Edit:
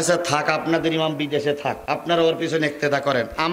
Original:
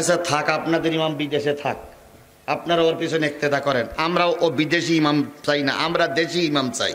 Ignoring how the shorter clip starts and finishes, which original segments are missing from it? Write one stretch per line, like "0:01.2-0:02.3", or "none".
0:01.8-0:02.4